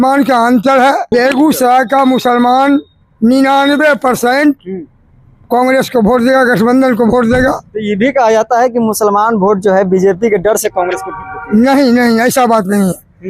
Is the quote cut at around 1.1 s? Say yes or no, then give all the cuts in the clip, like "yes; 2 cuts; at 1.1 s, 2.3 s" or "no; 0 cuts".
yes; 1 cut; at 1.1 s